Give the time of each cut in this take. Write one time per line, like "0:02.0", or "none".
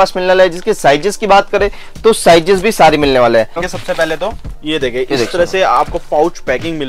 0:03.7

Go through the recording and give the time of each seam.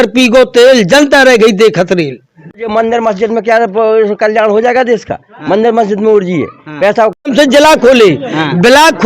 0:02.6
0:07.2

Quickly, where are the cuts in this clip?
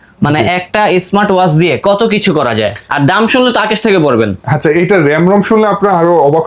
none

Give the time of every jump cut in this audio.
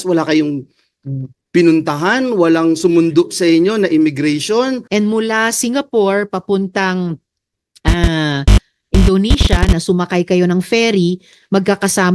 0:04.8

